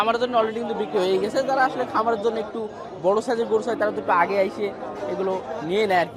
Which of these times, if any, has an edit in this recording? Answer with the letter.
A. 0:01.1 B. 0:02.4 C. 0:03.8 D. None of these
D